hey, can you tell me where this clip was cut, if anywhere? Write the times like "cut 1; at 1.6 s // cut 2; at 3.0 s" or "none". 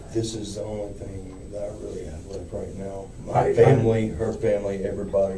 none